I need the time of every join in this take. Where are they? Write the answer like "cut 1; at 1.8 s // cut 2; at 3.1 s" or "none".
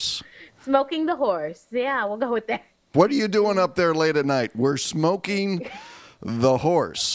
cut 1; at 2.8 s